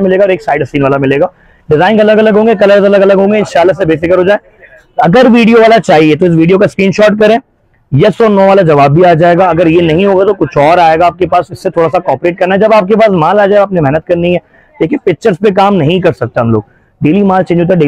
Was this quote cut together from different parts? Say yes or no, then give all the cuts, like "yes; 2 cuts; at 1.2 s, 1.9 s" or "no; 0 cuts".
no; 0 cuts